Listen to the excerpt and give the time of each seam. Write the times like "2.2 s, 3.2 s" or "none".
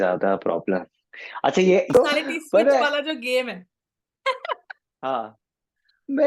1.9 s